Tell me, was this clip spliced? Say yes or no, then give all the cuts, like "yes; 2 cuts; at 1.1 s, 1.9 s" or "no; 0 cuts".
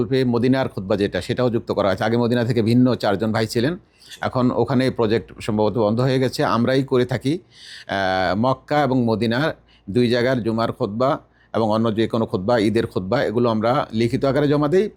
no; 0 cuts